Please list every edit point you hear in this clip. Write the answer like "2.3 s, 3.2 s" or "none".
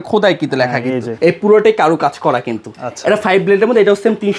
1.1 s